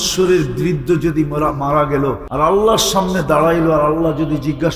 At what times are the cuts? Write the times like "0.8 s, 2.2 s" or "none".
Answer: 2.2 s